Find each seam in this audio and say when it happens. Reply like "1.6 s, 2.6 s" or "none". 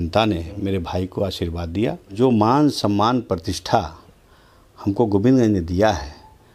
2.1 s